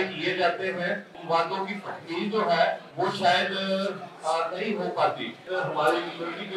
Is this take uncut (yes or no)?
no